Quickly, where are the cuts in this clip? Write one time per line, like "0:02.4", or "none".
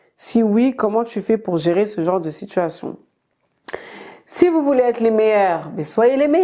none